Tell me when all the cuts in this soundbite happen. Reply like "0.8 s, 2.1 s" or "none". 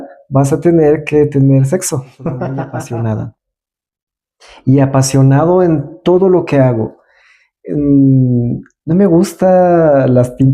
2.5 s